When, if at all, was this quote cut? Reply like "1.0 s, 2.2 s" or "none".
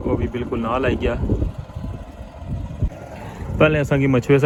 none